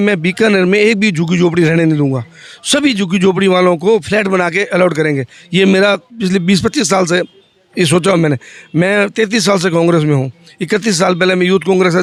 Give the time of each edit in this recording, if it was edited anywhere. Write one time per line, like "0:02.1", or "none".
none